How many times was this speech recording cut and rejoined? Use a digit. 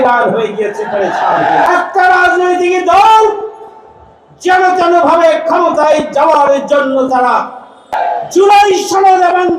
2